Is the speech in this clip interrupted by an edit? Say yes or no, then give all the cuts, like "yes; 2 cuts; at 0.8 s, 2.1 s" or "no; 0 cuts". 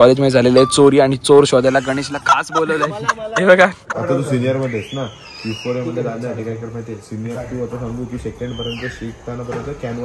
yes; 1 cut; at 3.9 s